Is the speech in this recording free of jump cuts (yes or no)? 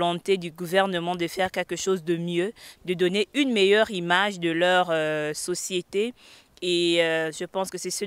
yes